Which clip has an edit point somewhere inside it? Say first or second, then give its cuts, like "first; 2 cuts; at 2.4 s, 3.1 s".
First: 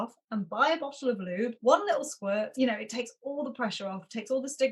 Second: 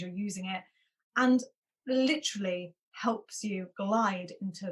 first; 2 cuts; at 1.6 s, 2.5 s